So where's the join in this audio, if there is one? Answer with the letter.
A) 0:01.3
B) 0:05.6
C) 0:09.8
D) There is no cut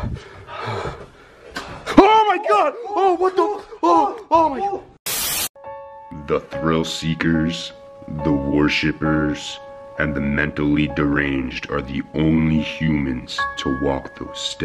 D